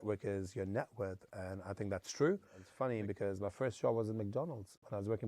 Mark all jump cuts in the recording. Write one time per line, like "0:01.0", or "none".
0:02.6

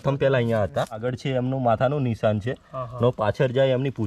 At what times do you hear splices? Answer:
0:01.1

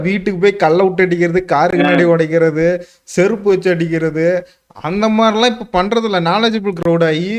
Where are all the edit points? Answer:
none

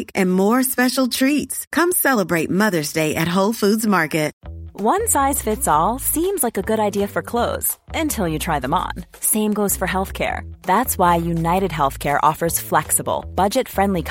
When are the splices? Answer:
0:04.4

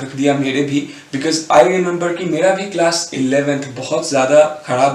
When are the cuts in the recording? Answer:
none

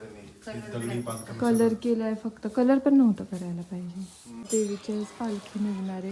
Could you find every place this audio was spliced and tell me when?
0:04.4

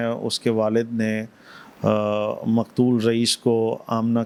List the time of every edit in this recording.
none

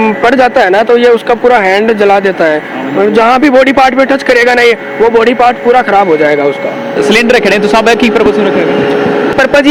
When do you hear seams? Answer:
none

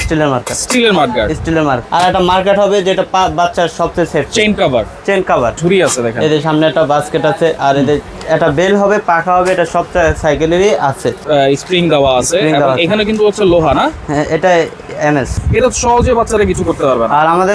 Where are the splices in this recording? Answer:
0:01.8
0:05.6
0:11.2
0:15.3

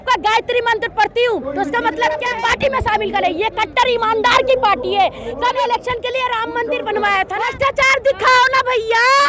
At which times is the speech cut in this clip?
0:02.3
0:05.5
0:07.5

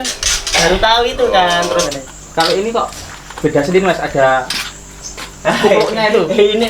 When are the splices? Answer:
0:01.8

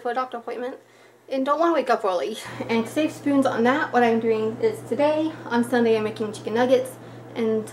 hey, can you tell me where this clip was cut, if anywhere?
0:02.5

